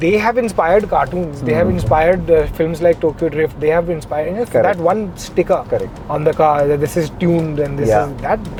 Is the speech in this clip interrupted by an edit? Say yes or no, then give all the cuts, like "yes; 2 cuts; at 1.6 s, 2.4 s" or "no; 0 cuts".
no; 0 cuts